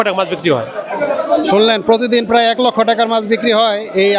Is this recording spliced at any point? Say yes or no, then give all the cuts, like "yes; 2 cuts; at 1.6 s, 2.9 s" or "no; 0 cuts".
no; 0 cuts